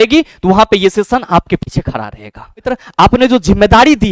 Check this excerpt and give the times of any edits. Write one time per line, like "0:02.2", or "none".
0:02.7